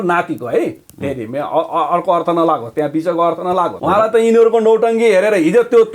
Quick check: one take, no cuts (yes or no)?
no